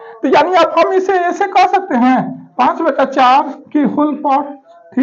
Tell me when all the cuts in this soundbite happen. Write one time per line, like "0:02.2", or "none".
none